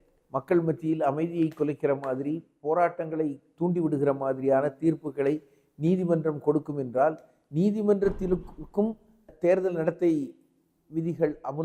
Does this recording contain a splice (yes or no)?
no